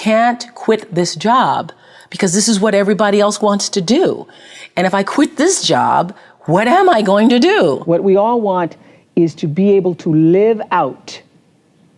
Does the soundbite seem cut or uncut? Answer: cut